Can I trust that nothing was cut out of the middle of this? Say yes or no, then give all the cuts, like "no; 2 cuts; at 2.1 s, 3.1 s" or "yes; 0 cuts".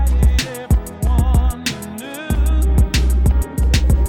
yes; 0 cuts